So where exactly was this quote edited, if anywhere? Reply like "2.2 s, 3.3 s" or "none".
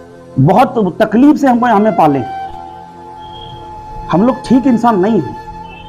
2.3 s, 3.9 s